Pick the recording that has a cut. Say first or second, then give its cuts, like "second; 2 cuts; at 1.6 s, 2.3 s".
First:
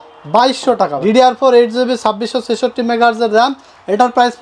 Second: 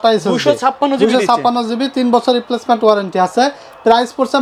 first; 1 cut; at 0.9 s